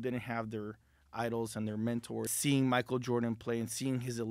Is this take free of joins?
no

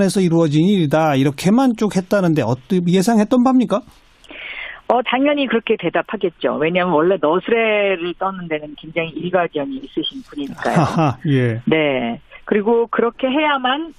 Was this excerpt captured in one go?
no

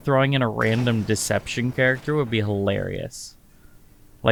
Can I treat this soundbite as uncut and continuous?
yes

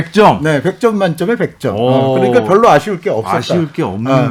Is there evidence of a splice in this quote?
no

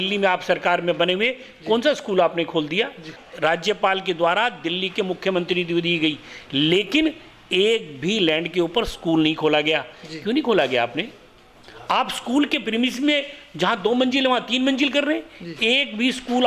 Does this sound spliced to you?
yes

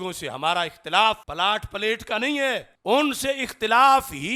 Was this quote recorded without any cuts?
no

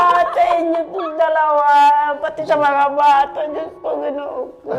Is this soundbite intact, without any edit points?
yes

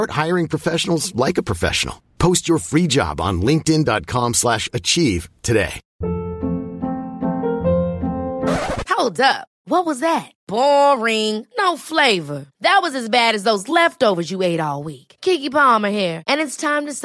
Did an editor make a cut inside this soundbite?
yes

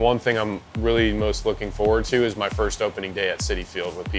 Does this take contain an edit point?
no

